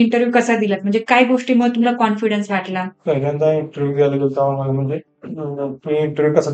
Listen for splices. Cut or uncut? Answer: cut